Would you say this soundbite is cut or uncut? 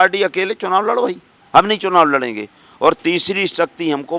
uncut